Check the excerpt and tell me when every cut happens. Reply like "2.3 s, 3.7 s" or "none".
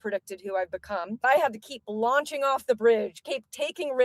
1.2 s